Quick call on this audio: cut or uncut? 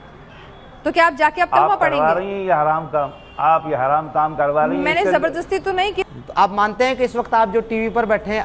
cut